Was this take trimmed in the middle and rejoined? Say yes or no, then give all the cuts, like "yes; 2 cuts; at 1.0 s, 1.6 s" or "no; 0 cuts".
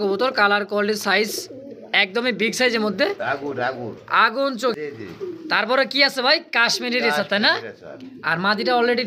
yes; 1 cut; at 4.7 s